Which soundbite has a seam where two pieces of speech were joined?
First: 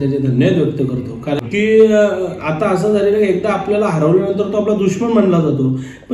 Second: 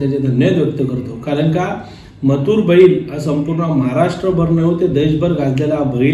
first; 1 cut; at 1.4 s

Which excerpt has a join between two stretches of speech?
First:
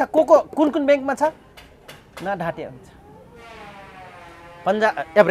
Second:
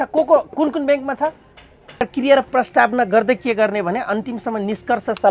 second; 1 cut; at 2.0 s

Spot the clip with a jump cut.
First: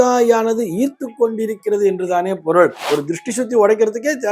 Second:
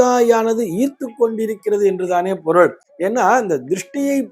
first; 1 cut; at 2.8 s

